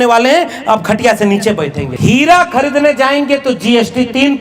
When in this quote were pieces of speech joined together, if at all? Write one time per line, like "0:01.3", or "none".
0:01.9